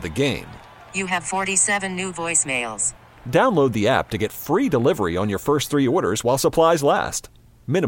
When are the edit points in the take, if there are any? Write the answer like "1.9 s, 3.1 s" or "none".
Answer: none

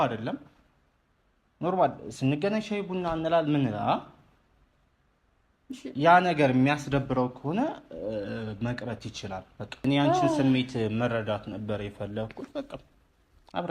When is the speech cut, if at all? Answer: 9.8 s

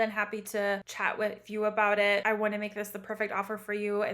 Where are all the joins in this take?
0.9 s, 2.2 s

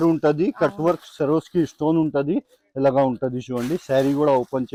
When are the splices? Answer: none

